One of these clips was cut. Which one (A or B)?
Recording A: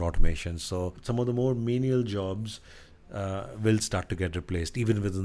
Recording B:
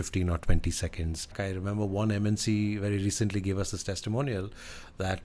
B